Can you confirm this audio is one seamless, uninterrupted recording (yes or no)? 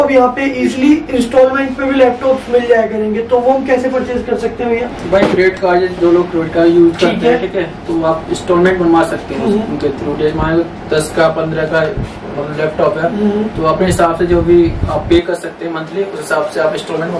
yes